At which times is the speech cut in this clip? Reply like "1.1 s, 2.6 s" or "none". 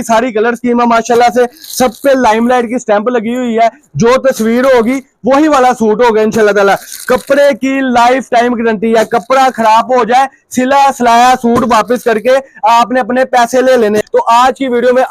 14.0 s